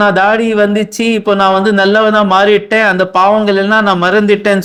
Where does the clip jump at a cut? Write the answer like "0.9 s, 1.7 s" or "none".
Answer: none